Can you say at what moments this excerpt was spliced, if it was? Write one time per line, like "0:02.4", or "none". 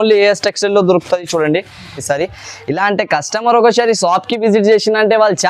0:02.0